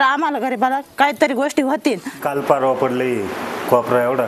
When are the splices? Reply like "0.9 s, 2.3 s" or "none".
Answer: 2.1 s